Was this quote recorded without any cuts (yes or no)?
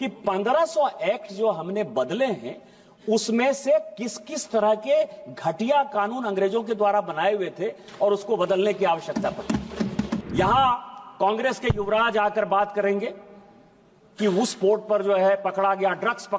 no